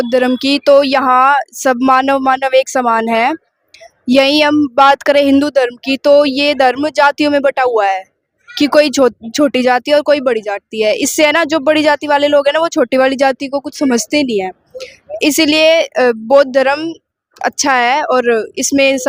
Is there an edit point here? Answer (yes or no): no